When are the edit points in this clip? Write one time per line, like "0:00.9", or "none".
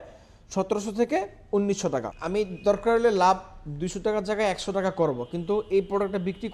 0:02.2